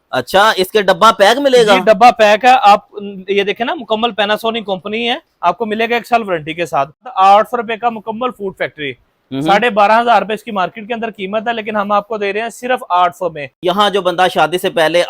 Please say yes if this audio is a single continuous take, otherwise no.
no